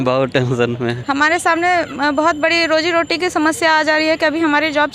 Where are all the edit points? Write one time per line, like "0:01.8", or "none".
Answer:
0:01.0